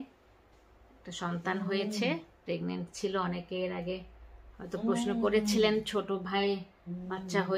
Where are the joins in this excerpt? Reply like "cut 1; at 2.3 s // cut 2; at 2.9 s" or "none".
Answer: none